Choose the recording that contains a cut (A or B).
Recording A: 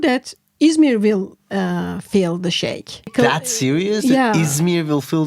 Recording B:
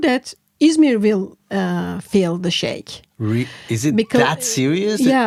A